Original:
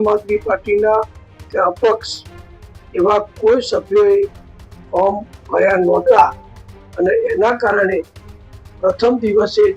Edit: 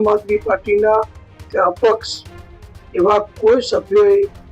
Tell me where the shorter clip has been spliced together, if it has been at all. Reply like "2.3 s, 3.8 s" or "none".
none

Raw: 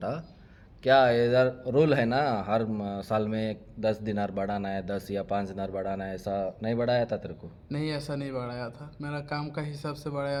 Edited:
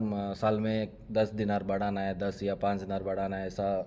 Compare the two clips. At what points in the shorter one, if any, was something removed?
none

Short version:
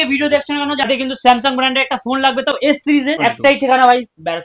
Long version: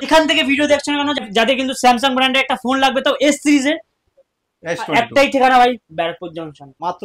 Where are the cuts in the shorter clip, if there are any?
0.9 s, 3.2 s

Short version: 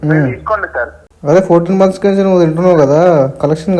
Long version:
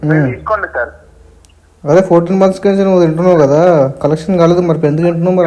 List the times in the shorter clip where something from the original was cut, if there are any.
1.0 s

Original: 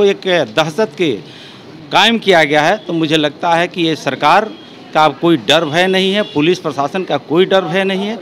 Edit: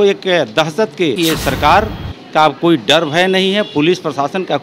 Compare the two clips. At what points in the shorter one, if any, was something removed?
1.2 s

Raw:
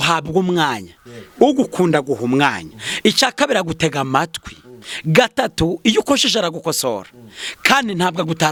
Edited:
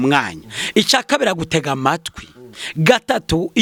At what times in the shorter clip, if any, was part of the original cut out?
none

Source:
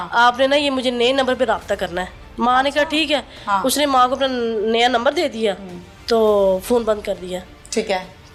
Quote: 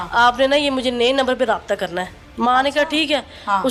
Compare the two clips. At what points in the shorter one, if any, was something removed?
none

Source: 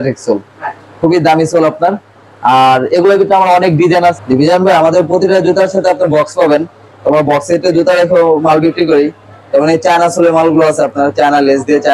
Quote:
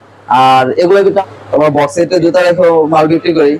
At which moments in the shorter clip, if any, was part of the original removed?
1.2 s

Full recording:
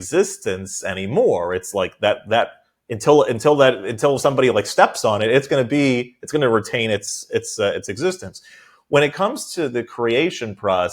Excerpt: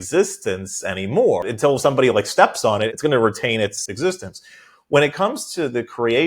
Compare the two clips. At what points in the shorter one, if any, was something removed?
1.4 s, 2.9 s, 3.9 s

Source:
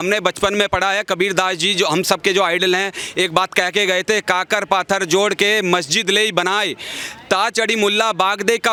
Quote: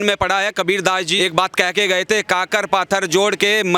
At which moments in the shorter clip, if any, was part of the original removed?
1.1 s

